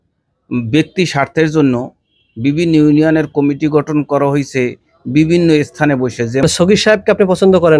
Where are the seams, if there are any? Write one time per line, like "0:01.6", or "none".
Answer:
0:06.4